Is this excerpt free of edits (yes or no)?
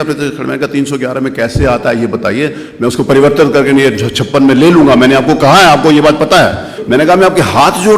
no